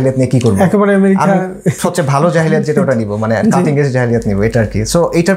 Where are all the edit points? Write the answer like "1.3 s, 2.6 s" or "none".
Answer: none